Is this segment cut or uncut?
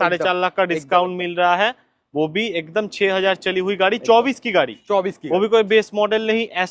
uncut